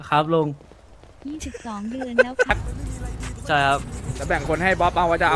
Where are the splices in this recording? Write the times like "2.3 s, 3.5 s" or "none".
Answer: 2.5 s